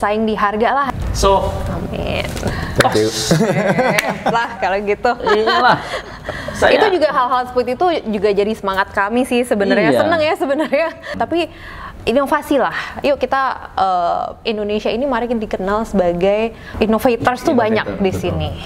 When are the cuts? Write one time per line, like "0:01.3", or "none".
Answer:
0:00.9
0:11.1
0:16.6